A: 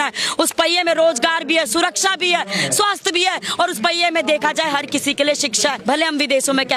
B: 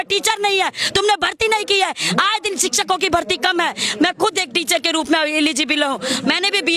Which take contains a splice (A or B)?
A